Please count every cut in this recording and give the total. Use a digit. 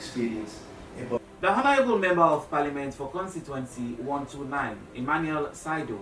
1